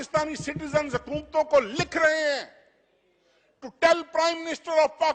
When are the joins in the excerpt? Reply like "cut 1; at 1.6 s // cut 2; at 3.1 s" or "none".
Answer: none